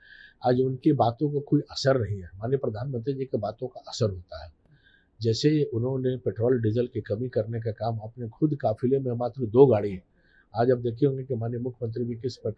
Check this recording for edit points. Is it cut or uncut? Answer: uncut